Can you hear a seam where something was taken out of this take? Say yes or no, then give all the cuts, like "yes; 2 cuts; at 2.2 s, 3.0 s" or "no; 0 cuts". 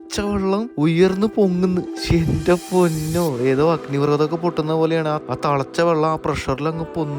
no; 0 cuts